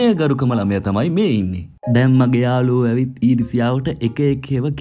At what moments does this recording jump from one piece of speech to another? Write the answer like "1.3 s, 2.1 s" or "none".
none